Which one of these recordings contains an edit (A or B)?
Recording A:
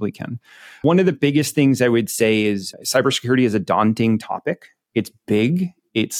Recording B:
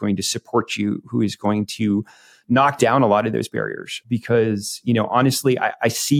B